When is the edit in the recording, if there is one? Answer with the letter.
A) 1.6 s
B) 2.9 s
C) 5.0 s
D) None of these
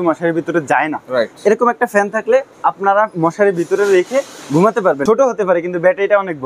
C